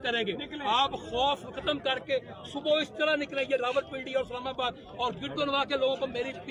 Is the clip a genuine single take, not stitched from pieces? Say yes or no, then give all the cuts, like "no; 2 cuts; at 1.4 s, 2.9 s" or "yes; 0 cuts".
yes; 0 cuts